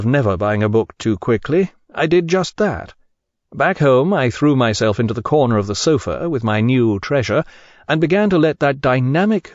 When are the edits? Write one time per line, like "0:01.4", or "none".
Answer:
0:08.4